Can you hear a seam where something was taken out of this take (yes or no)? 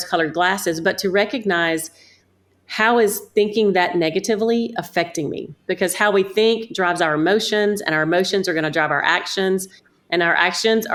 no